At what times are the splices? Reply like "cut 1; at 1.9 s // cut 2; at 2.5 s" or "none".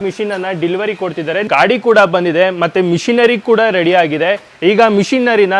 cut 1; at 1.5 s